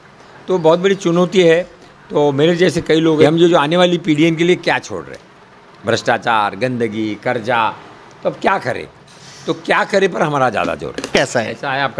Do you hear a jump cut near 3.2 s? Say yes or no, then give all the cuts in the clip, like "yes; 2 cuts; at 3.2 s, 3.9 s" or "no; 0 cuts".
yes; 2 cuts; at 3.2 s, 11.1 s